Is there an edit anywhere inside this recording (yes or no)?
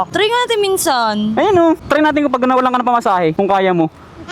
yes